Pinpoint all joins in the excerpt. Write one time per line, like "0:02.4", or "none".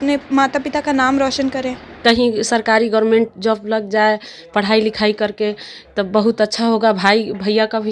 0:01.9